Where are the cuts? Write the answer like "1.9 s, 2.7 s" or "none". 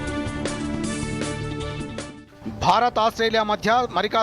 2.2 s